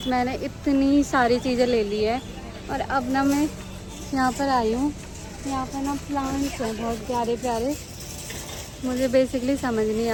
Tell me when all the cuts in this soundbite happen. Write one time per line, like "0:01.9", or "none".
none